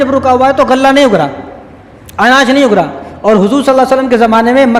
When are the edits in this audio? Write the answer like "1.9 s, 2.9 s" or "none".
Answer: none